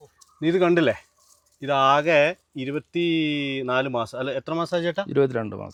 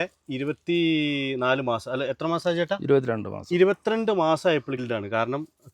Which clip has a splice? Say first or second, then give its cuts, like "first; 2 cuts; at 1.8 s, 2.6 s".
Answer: second; 1 cut; at 4.8 s